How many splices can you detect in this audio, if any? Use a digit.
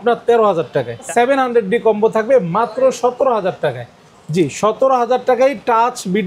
1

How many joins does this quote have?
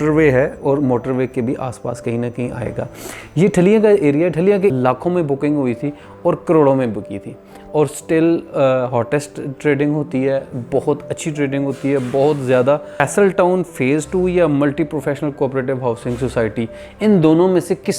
2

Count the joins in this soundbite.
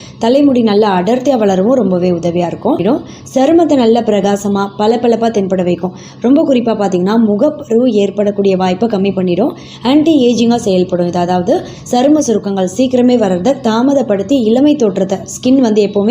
1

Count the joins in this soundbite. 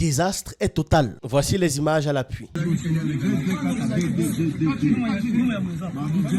0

